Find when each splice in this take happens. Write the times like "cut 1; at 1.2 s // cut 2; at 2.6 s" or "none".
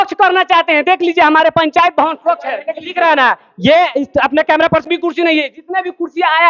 cut 1; at 4.8 s